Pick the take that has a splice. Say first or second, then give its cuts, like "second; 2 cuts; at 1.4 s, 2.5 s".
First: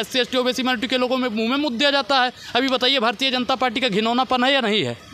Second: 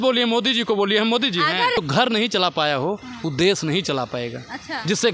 second; 1 cut; at 1.8 s